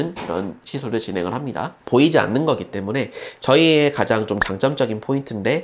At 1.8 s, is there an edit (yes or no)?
no